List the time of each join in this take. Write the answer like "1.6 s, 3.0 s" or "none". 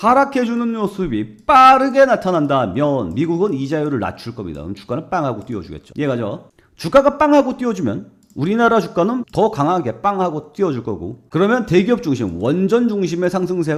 none